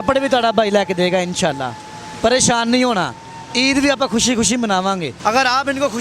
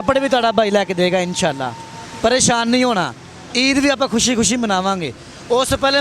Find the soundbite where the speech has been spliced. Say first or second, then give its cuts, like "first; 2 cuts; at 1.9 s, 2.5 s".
first; 1 cut; at 5.1 s